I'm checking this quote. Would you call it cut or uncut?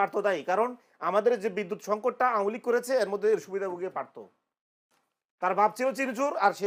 uncut